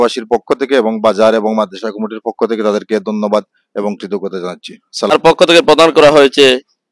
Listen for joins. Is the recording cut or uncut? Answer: cut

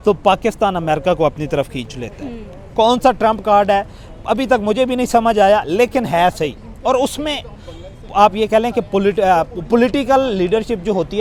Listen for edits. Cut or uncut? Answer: uncut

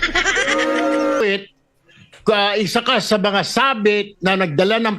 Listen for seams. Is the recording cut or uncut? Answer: cut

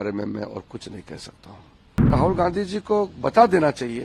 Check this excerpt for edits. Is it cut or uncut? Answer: cut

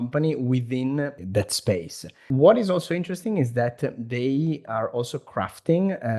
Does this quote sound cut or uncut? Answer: cut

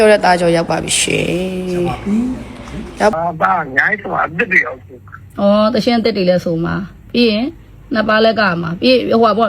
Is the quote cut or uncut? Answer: cut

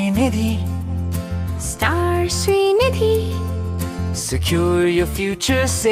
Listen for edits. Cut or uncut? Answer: uncut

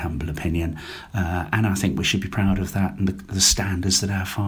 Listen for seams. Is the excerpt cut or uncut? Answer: uncut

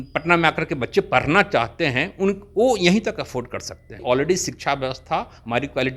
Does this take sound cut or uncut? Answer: cut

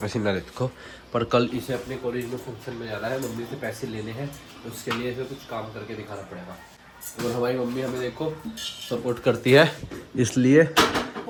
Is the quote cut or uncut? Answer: uncut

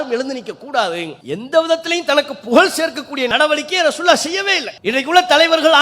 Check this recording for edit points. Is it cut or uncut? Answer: cut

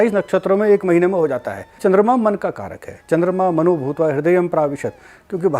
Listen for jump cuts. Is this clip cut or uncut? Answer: cut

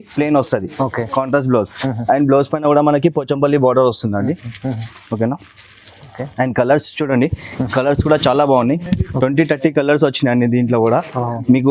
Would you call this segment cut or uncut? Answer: uncut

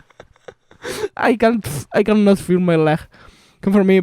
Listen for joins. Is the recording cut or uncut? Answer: uncut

